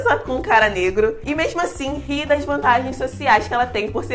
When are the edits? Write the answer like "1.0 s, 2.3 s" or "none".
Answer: none